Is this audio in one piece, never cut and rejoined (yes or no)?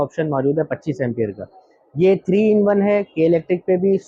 yes